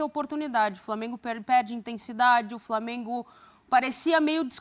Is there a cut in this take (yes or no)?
no